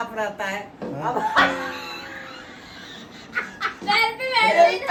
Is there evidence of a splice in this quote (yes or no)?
no